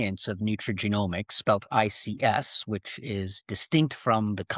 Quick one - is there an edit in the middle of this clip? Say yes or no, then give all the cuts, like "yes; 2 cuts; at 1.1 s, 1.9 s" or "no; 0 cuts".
no; 0 cuts